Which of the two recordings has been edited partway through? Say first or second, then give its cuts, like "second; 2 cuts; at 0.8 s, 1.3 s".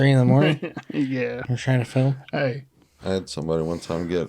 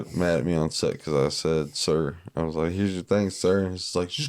first; 1 cut; at 2.9 s